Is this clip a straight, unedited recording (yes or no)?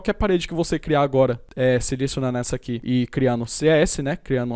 yes